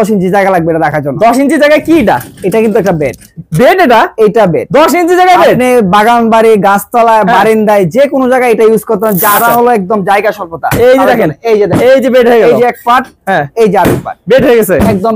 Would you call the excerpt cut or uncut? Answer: uncut